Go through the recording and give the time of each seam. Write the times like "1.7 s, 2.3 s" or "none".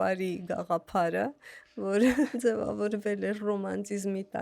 2.3 s